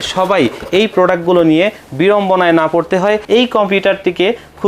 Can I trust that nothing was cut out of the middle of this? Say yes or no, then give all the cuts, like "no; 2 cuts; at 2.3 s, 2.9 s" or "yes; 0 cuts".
no; 1 cut; at 3.2 s